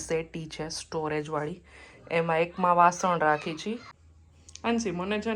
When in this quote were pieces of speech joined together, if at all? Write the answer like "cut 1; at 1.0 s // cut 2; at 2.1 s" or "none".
cut 1; at 3.9 s